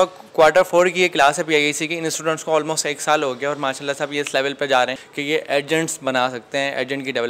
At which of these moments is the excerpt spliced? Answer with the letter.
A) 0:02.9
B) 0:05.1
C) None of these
B